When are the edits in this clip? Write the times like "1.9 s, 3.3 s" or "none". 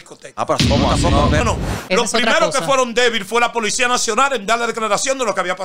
1.4 s

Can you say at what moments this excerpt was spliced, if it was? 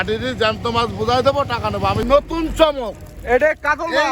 2.0 s

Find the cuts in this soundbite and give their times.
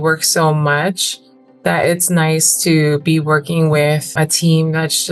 4.1 s

